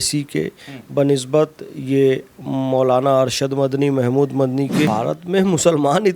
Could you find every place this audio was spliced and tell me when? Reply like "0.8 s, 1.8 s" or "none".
4.9 s